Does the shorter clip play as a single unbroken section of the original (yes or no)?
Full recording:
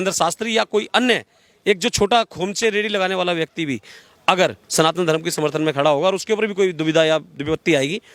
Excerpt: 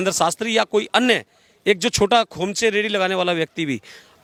yes